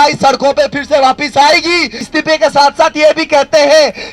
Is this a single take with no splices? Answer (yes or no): no